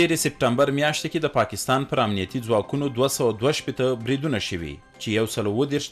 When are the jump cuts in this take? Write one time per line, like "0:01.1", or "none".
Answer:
none

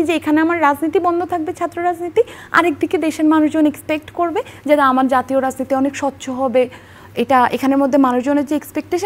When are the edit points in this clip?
none

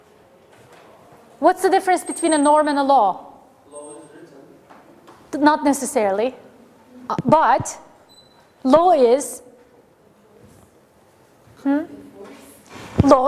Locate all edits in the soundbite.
0:08.9

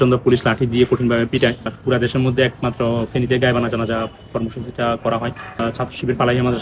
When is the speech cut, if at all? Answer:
0:01.7
0:05.6

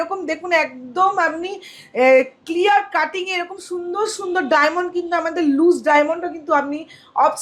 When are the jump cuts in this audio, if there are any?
none

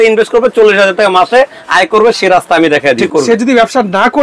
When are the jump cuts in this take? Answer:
0:03.0

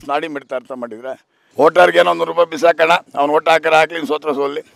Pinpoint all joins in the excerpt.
0:01.3

